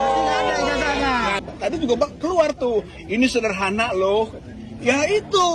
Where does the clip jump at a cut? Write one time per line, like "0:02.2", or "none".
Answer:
0:01.4